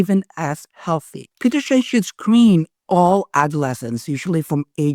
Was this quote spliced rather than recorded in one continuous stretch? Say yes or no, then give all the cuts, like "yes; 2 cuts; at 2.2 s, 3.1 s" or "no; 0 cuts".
yes; 1 cut; at 1.2 s